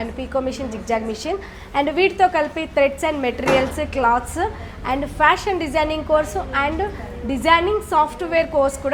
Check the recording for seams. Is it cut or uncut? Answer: uncut